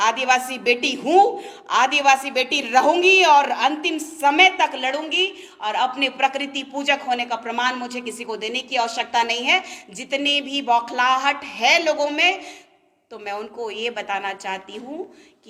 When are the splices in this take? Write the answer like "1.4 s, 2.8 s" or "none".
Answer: none